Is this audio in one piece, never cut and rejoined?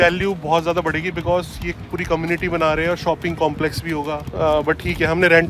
yes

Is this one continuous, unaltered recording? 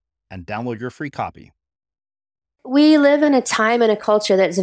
no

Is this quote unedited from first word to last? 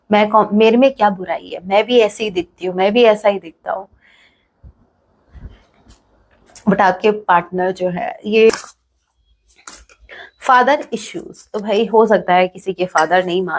no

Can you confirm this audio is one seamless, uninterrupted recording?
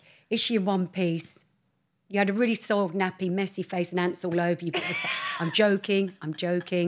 yes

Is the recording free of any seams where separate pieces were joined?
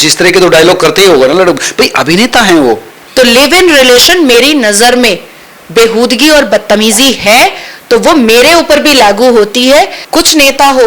no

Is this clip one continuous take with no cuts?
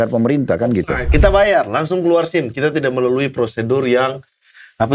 no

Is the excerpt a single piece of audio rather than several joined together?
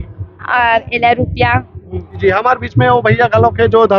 no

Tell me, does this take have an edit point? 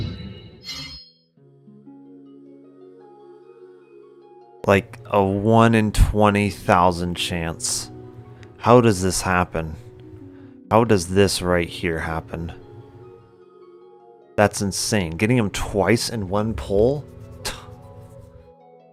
no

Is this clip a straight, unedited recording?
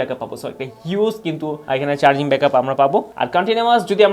yes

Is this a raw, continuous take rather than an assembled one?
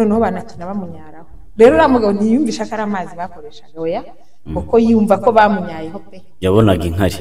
yes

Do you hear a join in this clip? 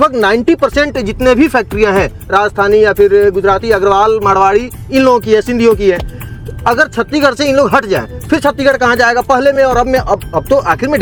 no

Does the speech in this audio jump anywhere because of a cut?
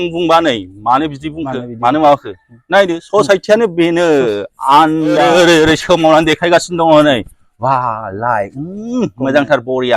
yes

